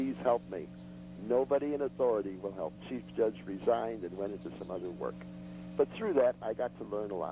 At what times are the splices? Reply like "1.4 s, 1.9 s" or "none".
none